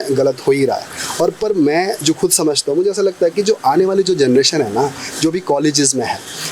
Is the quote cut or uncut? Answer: uncut